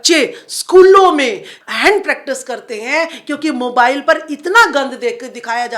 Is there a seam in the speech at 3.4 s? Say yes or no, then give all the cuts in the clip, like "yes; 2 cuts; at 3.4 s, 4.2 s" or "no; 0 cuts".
no; 1 cut; at 1.6 s